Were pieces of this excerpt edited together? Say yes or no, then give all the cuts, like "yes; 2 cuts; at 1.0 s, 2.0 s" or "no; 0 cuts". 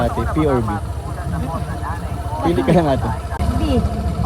yes; 1 cut; at 3.3 s